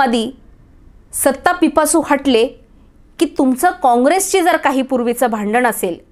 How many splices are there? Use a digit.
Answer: 0